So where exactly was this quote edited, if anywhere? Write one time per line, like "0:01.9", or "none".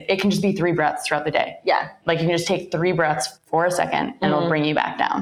0:03.3